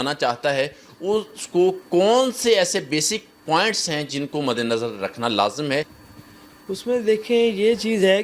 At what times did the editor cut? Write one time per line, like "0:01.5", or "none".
0:06.0